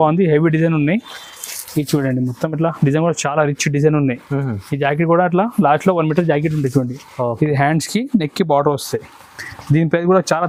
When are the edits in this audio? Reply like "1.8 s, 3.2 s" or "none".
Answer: none

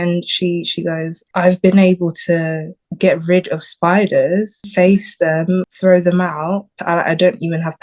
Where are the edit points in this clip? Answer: 1.2 s, 4.6 s, 5.7 s, 6.7 s

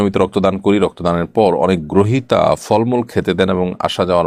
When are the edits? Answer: none

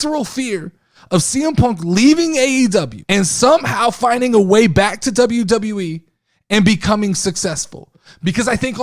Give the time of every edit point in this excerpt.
3.0 s

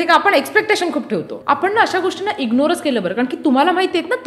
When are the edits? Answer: 1.3 s

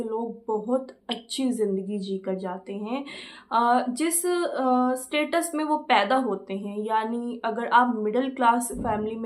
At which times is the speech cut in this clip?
none

